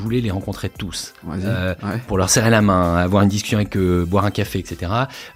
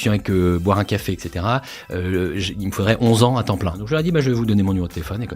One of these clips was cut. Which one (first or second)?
second